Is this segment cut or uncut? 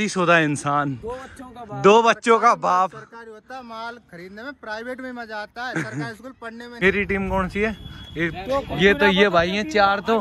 cut